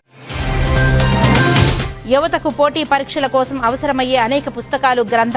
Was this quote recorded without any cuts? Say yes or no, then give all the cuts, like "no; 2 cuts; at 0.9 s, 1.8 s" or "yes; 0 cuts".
yes; 0 cuts